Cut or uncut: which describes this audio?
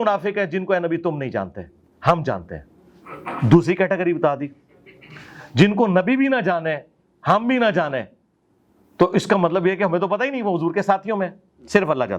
uncut